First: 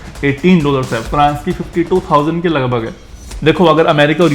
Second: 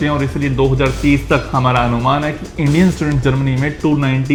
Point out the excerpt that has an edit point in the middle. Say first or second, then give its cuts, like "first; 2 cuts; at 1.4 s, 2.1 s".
first; 1 cut; at 3.1 s